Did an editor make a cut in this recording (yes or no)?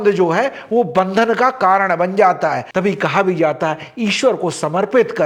yes